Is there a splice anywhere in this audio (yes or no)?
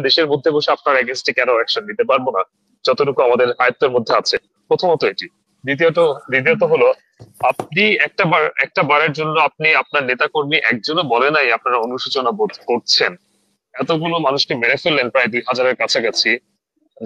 no